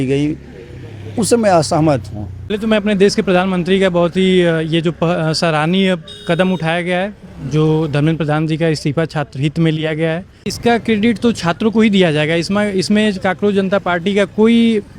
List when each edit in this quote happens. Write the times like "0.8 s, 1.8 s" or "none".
2.5 s, 10.5 s